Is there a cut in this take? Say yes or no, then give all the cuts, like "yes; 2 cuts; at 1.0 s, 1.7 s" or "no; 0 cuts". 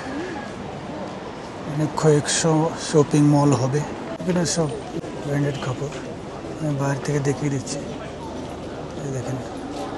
yes; 2 cuts; at 4.1 s, 5.0 s